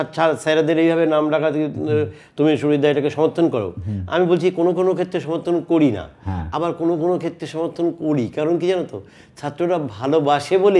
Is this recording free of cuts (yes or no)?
yes